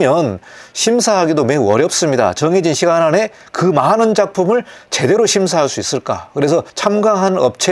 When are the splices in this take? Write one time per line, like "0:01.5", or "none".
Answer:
0:06.7